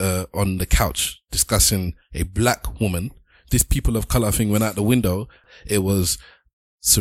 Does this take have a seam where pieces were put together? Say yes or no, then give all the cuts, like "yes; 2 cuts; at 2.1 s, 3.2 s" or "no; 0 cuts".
yes; 1 cut; at 5.4 s